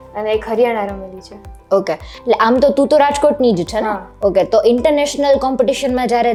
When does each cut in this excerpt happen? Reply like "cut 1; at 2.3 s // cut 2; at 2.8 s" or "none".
none